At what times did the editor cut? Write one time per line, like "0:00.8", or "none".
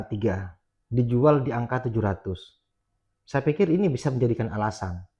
none